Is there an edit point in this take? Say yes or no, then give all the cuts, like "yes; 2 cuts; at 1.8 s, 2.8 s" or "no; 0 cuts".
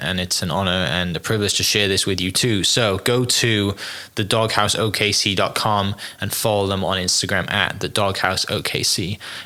no; 0 cuts